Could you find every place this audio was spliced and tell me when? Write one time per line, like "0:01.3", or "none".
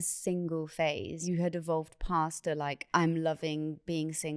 0:01.2
0:02.8